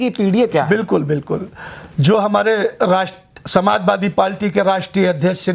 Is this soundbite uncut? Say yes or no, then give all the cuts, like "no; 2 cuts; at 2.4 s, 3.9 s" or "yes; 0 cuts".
yes; 0 cuts